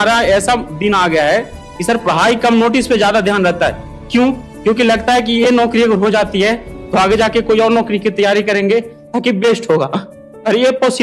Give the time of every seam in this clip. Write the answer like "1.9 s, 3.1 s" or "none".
none